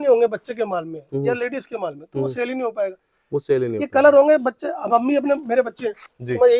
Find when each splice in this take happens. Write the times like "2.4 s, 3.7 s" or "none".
none